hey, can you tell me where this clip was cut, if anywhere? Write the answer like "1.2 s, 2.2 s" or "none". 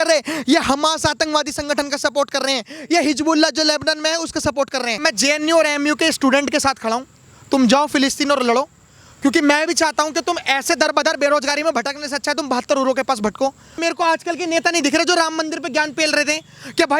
5.0 s, 13.8 s